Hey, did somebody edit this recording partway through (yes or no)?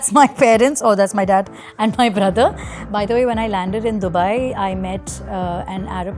no